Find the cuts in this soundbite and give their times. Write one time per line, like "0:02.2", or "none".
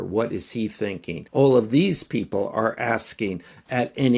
0:01.1